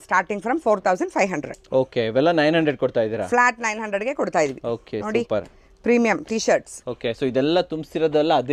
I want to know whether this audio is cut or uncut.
uncut